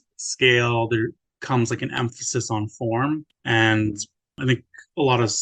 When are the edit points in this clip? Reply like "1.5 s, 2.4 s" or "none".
1.3 s, 3.3 s, 4.4 s